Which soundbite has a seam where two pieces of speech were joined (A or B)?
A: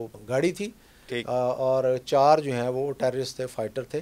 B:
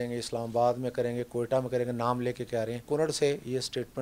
B